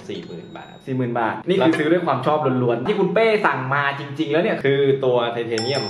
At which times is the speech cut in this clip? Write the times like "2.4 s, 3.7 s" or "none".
1.4 s, 2.8 s, 4.6 s